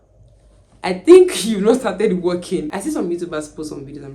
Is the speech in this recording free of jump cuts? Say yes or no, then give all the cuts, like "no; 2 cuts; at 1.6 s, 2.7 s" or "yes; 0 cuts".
no; 1 cut; at 2.7 s